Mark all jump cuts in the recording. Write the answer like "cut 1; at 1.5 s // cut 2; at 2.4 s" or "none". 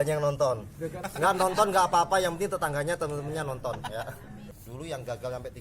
cut 1; at 1.0 s // cut 2; at 4.5 s